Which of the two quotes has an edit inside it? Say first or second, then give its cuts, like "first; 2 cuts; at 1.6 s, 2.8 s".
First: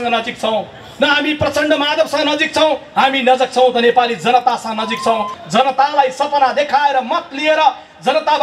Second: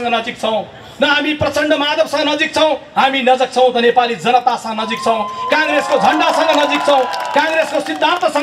first; 1 cut; at 5.4 s